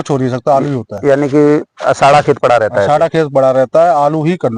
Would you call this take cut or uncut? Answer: uncut